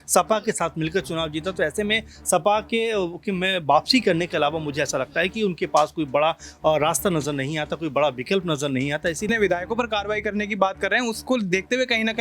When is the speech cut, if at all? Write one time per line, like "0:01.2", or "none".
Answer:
0:09.3